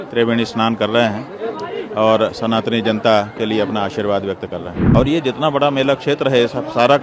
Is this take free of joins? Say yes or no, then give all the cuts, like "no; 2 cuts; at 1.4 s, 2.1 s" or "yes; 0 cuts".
no; 1 cut; at 4.8 s